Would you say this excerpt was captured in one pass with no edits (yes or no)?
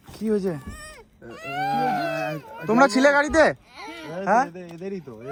yes